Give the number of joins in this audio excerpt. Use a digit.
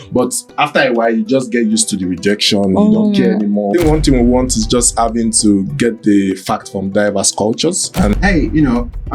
2